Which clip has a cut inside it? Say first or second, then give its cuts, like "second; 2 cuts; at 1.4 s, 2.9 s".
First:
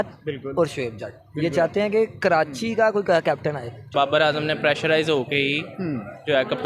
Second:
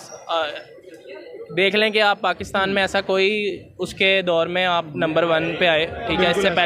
first; 1 cut; at 3.8 s